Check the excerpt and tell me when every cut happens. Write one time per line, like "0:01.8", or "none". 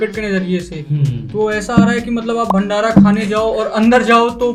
none